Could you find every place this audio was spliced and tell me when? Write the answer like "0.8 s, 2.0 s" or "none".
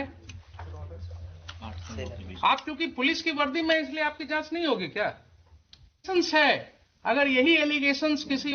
6.1 s